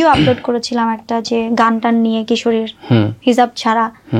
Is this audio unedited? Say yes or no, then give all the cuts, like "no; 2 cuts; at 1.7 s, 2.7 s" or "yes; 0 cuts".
yes; 0 cuts